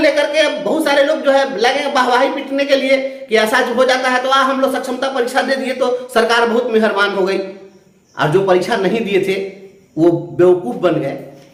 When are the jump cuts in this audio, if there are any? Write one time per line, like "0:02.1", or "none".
none